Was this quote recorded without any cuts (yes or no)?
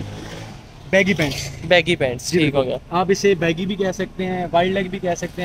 yes